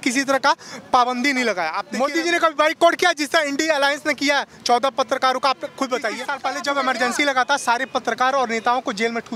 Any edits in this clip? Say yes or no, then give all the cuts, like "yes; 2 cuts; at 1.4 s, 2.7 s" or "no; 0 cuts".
yes; 2 cuts; at 1.8 s, 6.3 s